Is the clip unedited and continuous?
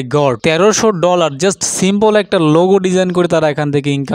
yes; 0 cuts

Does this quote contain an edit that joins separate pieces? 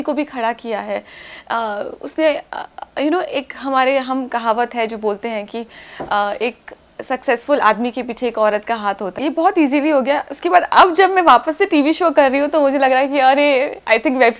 yes; 1 cut; at 9.1 s

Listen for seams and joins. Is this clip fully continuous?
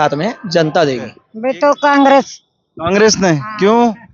no; 1 cut; at 1.3 s

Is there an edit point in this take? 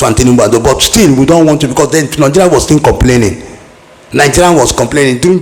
no; 0 cuts

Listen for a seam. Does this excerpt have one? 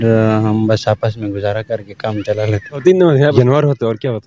yes; 1 cut; at 3.3 s

